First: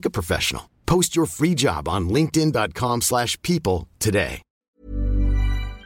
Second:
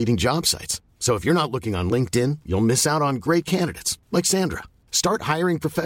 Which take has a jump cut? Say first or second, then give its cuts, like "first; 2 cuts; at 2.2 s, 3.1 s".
first; 1 cut; at 4.5 s